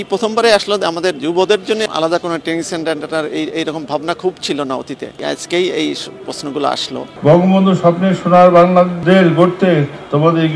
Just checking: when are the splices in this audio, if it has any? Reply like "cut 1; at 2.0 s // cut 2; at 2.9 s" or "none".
cut 1; at 1.8 s // cut 2; at 7.1 s // cut 3; at 9.0 s